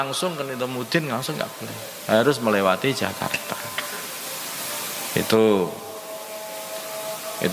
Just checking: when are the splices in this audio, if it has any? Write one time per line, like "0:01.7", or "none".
none